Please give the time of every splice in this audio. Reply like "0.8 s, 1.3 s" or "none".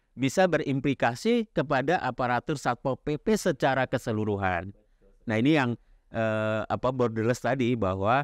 none